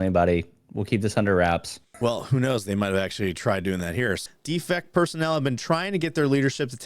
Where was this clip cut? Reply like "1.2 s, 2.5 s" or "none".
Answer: 1.9 s, 4.2 s